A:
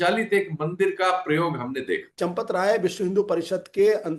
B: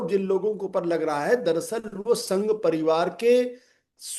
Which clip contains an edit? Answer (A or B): A